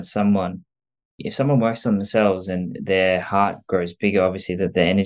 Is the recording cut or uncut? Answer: cut